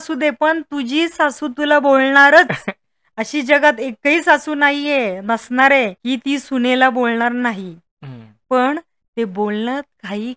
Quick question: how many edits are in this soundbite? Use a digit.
1